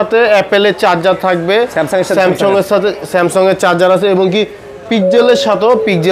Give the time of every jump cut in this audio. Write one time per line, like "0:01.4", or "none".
none